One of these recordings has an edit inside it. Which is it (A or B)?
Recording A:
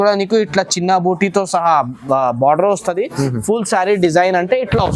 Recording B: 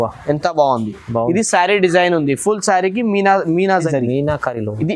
B